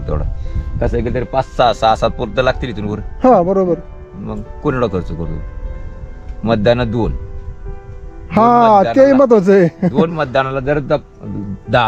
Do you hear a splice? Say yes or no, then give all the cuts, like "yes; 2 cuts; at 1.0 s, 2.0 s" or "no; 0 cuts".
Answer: no; 0 cuts